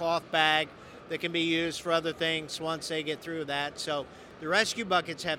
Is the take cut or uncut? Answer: cut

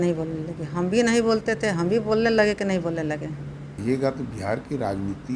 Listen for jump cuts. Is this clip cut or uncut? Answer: cut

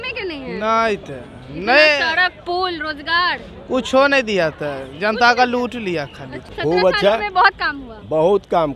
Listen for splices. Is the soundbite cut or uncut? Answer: cut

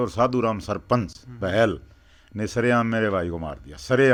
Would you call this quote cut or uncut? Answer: uncut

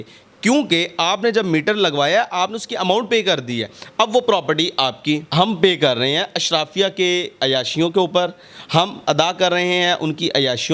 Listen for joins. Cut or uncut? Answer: cut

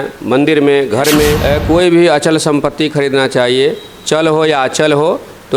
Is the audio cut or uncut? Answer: cut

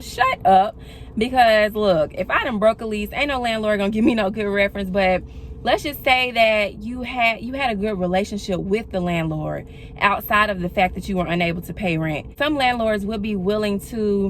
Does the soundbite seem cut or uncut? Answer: uncut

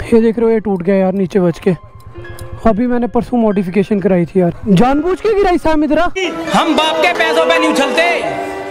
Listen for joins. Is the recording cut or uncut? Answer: cut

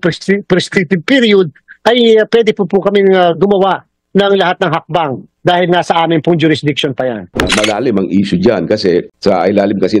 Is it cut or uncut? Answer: cut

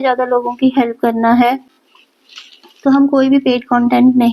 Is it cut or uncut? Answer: uncut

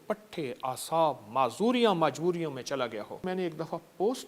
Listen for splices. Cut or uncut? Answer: cut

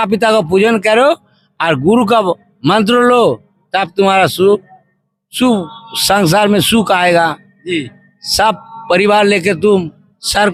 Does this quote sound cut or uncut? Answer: uncut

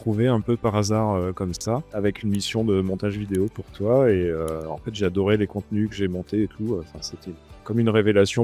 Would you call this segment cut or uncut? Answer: uncut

